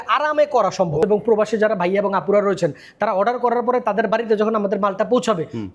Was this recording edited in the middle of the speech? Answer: yes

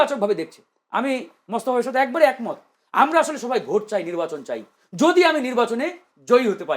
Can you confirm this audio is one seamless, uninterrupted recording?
yes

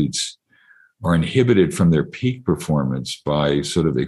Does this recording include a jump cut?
no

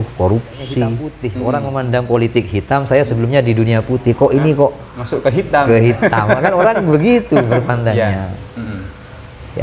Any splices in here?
yes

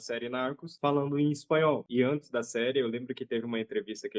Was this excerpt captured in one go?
yes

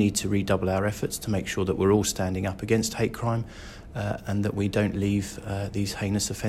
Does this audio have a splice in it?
no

